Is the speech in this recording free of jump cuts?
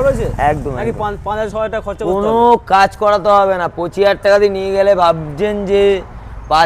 yes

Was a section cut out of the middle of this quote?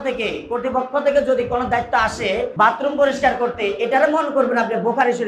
yes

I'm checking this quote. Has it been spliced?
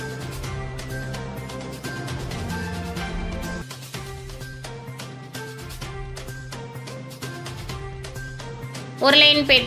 no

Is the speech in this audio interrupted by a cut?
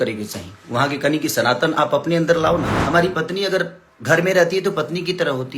yes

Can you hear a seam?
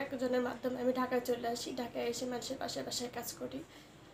no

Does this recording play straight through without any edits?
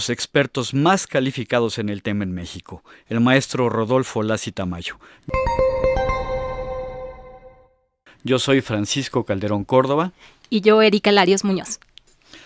no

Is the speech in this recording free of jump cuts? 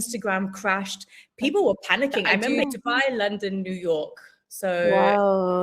no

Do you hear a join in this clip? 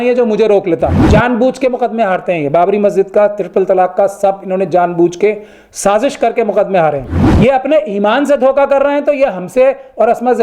yes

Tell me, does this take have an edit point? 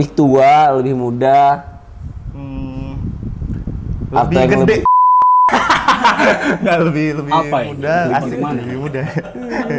no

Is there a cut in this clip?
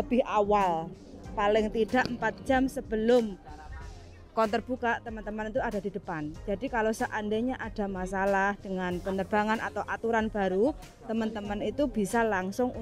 no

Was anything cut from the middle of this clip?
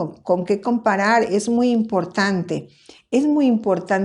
yes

